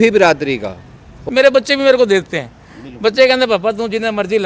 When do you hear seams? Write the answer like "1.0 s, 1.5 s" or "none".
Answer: 1.2 s